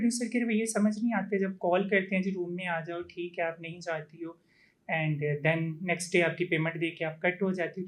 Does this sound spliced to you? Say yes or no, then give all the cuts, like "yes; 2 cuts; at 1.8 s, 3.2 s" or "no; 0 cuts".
no; 0 cuts